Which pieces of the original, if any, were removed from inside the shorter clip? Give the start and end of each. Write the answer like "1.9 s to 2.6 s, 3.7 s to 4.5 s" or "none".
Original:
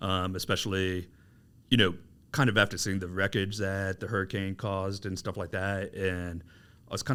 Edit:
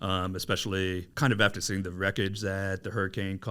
1.1 s to 2.2 s